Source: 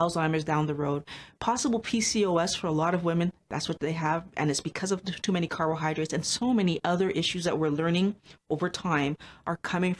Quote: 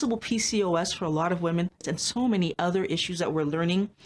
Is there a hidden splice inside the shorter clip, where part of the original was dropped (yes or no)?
yes